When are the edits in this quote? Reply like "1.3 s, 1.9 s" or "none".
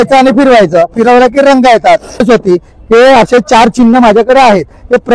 2.2 s

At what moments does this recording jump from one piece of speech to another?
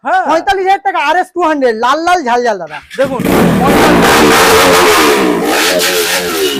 none

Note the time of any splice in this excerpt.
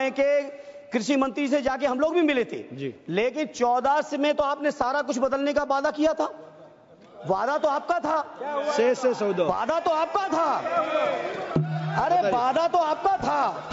none

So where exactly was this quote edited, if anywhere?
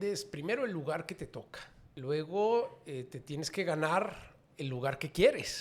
1.9 s

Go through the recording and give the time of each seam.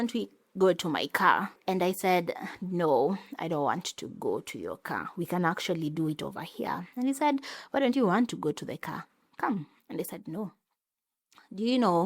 1.5 s

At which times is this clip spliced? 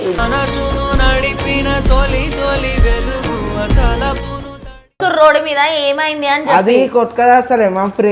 5.0 s

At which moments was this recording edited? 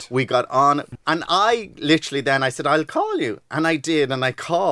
0.9 s

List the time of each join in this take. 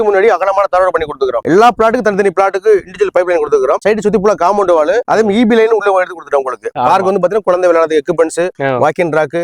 1.4 s, 6.7 s

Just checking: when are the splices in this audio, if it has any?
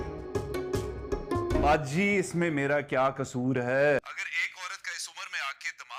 none

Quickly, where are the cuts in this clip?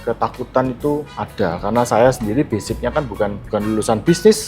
1.2 s, 3.4 s

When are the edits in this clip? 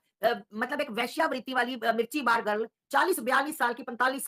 2.8 s

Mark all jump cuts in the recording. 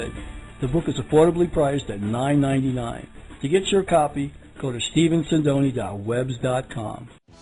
none

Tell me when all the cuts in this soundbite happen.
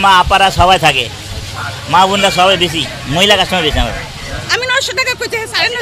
4.5 s

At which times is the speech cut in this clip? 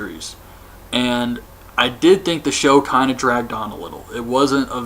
1.1 s

